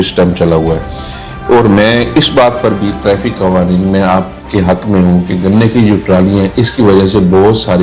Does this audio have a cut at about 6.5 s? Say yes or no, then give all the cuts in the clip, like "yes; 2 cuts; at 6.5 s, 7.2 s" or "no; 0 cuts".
no; 0 cuts